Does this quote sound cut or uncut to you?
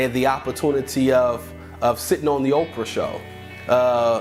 uncut